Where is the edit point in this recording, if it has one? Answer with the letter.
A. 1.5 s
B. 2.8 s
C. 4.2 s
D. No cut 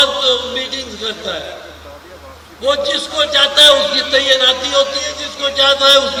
D